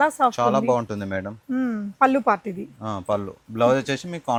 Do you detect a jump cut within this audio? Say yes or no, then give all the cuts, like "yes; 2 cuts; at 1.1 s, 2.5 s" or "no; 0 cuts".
no; 0 cuts